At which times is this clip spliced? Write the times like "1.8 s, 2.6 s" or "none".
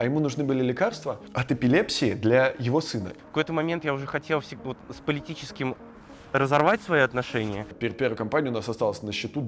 1.3 s, 3.1 s, 7.6 s